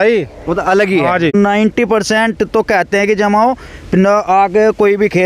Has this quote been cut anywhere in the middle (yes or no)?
yes